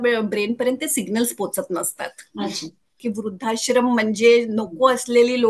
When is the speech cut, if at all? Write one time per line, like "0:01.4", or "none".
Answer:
0:02.9